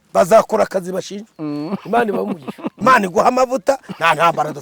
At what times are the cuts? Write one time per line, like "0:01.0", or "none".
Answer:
0:02.6